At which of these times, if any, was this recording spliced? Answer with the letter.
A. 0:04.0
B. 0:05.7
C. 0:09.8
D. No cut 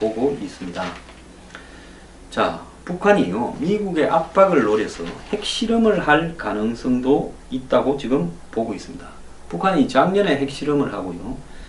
A